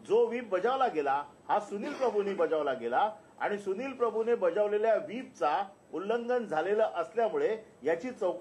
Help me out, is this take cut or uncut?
uncut